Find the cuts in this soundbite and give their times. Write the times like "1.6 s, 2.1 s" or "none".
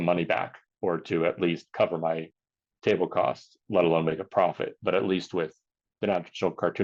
none